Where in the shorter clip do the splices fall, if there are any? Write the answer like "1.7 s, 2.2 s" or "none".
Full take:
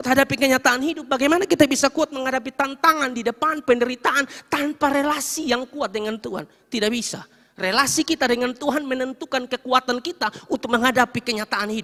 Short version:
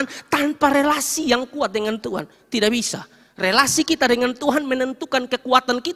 none